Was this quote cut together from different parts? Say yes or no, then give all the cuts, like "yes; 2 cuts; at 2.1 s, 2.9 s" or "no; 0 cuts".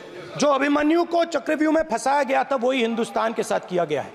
no; 0 cuts